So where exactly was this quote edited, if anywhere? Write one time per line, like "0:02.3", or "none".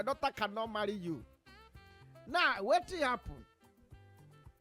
none